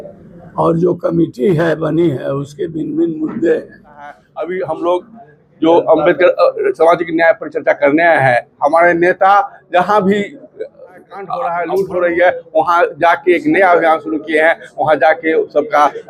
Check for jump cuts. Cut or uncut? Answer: cut